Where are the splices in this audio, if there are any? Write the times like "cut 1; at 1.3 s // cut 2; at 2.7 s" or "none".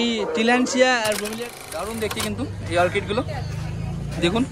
cut 1; at 1.4 s